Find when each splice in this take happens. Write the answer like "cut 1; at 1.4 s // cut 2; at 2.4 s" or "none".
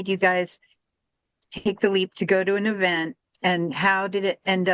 none